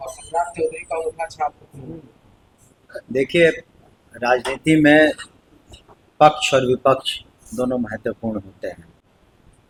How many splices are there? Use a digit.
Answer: 0